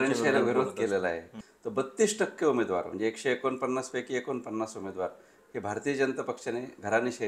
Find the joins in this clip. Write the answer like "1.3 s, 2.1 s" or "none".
1.3 s